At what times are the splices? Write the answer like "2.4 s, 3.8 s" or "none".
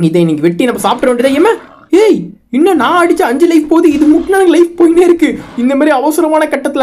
5.4 s

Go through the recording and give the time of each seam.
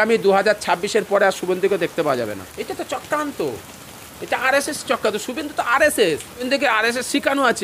2.4 s, 6.5 s

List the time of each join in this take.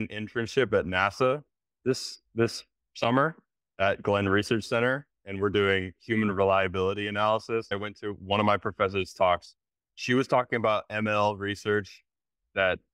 7.7 s, 9.7 s

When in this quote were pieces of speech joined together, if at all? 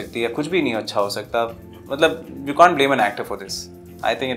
none

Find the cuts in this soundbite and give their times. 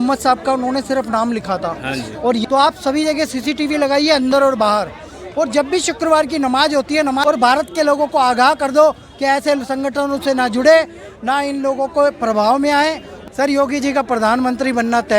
2.4 s, 7.2 s, 13.1 s

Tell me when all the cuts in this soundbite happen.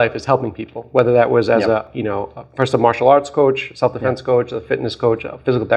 none

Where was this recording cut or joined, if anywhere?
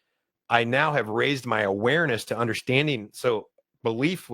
3.1 s

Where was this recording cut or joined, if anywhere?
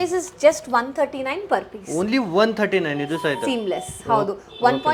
none

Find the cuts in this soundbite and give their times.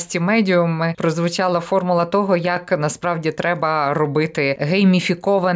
0.9 s, 4.6 s

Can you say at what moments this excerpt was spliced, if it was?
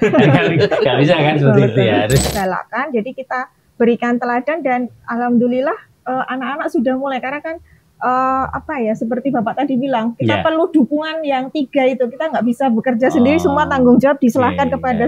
2.3 s

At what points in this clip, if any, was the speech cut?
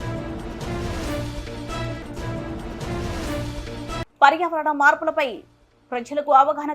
4.1 s

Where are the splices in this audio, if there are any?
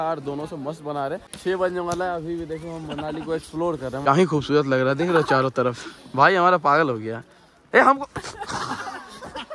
1.3 s, 4.1 s

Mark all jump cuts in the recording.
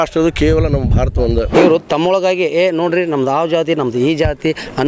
1.5 s

